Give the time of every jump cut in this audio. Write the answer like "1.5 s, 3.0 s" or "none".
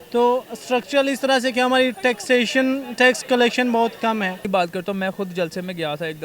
4.4 s